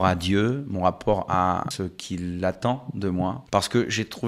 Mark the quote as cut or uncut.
cut